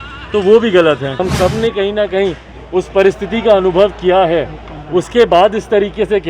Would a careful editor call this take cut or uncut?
cut